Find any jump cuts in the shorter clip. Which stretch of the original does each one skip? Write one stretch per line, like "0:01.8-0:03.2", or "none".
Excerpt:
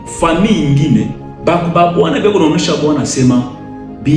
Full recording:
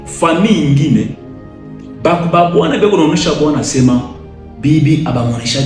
0:01.2-0:01.8